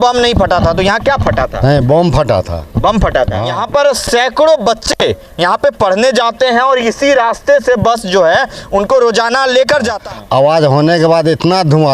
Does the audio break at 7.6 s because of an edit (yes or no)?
no